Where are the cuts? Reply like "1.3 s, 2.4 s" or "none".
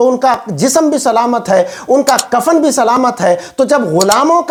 none